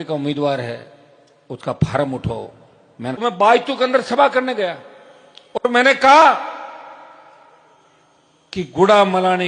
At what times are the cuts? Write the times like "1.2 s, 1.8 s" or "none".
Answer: 3.2 s